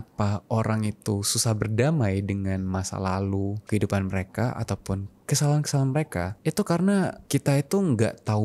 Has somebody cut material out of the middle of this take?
yes; 3 cuts; at 3.6 s, 6.3 s, 7.2 s

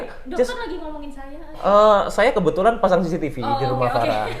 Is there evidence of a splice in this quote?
no; 0 cuts

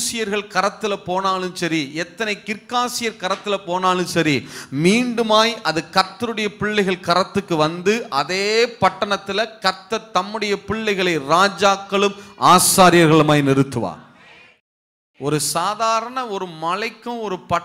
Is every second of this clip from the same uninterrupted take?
no; 1 cut; at 14.6 s

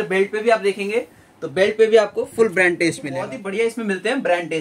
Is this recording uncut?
no; 1 cut; at 3.4 s

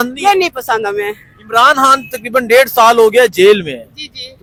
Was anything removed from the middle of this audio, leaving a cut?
no; 0 cuts

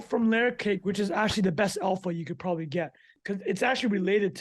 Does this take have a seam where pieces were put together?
yes; 1 cut; at 3.1 s

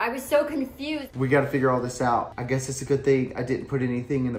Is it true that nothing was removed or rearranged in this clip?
no; 2 cuts; at 1.0 s, 2.4 s

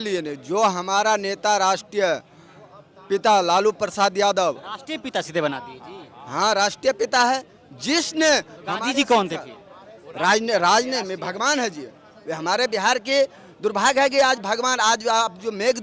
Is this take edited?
no; 0 cuts

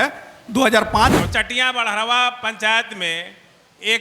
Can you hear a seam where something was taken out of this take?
yes; 1 cut; at 1.2 s

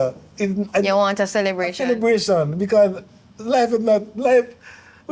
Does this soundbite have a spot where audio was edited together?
no; 0 cuts

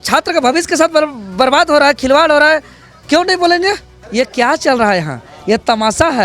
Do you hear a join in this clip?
yes; 1 cut; at 4.0 s

